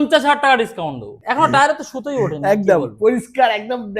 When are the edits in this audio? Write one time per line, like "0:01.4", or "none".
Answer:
0:01.1